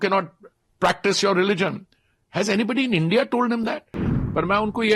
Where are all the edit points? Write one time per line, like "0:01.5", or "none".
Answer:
0:04.0

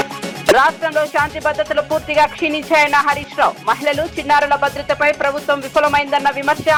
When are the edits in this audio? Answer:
none

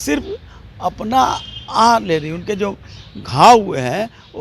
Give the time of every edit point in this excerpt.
none

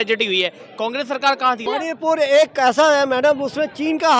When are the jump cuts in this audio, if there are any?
0:01.6

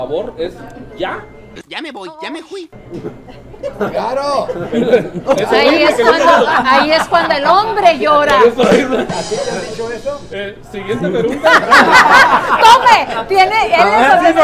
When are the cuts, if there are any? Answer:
none

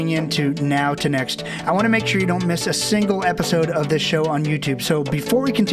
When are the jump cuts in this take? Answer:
none

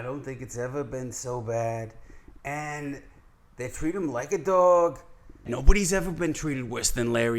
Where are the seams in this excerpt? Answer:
0:05.5

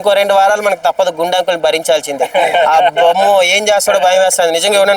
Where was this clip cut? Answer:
none

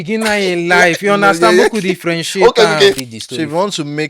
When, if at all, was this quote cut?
0:03.1

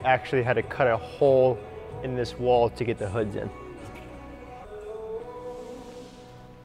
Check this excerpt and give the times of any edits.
none

